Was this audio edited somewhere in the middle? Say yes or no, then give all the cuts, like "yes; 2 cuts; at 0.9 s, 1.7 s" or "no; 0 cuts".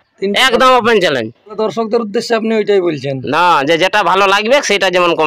yes; 1 cut; at 1.6 s